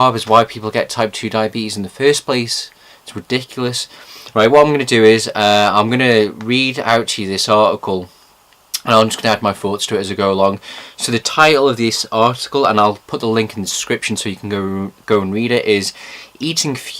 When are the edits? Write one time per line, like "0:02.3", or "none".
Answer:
0:04.5